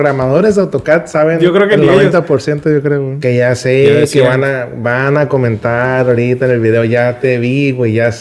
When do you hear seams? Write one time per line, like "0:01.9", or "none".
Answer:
0:03.2